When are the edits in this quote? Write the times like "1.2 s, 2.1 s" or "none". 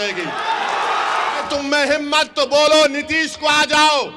1.5 s